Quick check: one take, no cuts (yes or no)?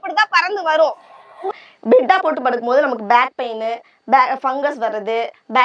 no